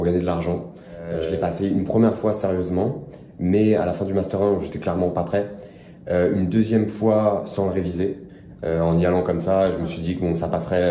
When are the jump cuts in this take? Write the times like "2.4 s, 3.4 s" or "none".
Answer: 1.2 s